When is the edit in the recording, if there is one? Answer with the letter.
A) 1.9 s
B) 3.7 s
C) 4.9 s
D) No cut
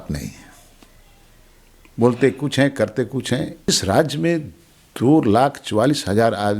B